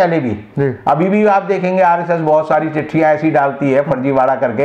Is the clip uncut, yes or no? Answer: yes